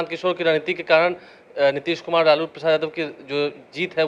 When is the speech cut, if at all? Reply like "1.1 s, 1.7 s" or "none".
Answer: none